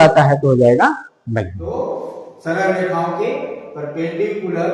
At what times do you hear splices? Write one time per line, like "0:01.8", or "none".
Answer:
0:01.6